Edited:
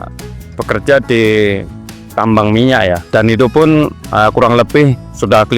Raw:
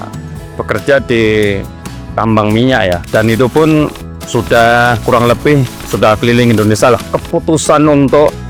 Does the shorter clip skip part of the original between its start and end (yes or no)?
yes